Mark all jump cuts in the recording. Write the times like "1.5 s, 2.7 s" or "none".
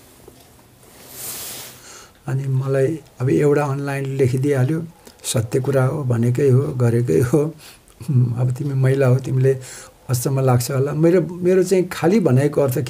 1.8 s